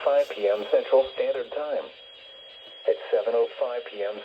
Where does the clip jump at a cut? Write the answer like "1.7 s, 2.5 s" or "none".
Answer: 1.1 s